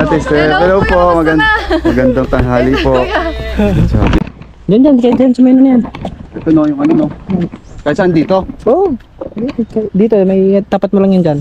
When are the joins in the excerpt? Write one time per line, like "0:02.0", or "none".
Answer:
0:04.2